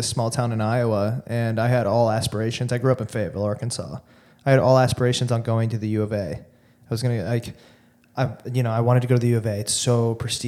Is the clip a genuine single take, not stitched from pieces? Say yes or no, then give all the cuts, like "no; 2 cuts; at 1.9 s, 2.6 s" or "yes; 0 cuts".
yes; 0 cuts